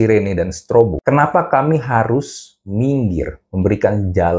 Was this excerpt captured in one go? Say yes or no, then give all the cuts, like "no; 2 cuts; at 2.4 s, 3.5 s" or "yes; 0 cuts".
no; 1 cut; at 1.0 s